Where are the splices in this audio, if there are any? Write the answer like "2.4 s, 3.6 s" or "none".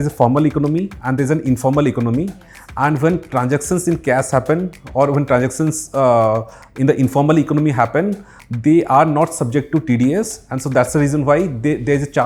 none